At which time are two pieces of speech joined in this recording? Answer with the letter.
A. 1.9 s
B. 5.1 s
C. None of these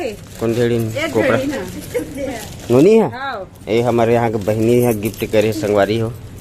C